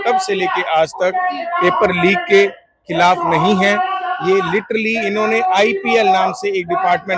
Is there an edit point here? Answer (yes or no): no